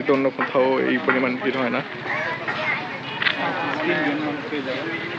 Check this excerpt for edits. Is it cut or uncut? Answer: uncut